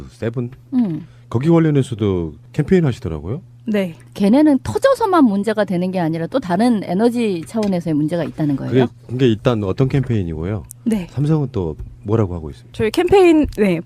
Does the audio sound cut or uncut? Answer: uncut